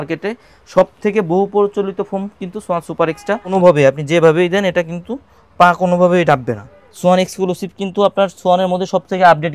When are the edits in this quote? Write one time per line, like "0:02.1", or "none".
0:03.5
0:06.8